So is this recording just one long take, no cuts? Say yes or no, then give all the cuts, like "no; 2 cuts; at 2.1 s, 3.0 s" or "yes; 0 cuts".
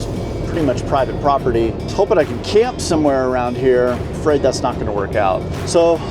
yes; 0 cuts